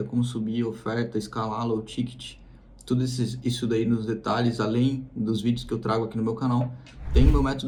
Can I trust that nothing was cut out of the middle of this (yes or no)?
yes